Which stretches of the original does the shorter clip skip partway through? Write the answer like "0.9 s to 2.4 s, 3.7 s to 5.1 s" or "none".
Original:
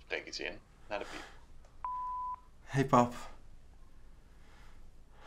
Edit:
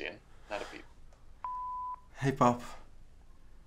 2.5 s to 2.6 s